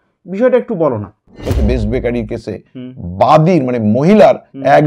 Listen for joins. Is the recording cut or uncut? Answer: cut